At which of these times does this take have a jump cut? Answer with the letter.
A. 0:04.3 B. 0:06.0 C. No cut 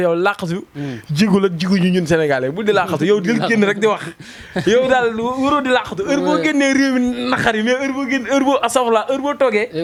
C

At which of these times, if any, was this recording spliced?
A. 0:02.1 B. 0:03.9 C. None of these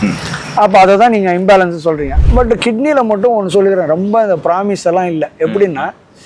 A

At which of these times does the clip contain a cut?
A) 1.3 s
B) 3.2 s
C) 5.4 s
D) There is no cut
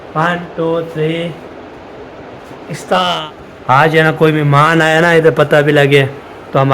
B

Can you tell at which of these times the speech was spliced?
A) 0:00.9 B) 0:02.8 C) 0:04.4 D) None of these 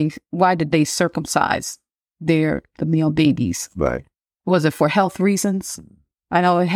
D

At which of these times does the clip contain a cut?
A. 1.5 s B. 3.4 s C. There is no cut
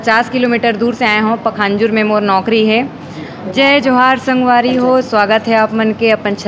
B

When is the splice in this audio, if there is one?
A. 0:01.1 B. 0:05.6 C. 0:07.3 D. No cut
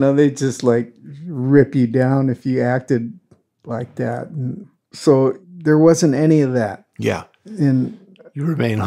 D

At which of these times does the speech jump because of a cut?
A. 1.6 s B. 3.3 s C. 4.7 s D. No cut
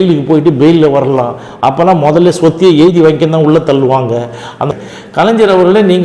C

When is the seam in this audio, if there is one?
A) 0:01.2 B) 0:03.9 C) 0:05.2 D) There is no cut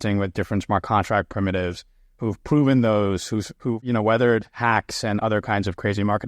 B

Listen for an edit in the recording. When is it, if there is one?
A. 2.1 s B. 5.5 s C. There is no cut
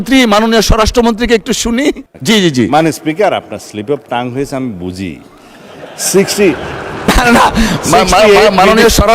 A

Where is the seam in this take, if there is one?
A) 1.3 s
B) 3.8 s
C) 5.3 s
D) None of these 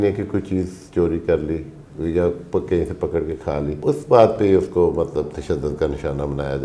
B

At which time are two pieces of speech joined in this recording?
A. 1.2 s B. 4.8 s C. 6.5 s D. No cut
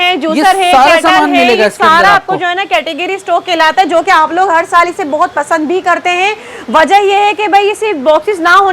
D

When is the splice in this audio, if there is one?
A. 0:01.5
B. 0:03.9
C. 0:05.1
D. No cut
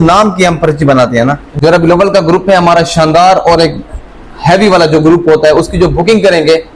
A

